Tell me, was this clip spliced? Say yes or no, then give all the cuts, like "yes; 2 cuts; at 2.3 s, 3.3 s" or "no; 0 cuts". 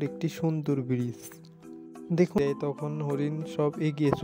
yes; 1 cut; at 2.3 s